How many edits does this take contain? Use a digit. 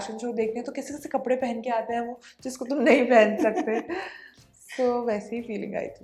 0